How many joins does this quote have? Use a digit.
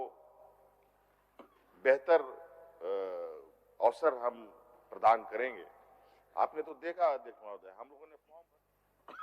1